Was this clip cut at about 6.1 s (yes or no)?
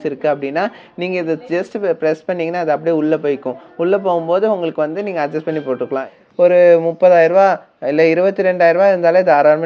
yes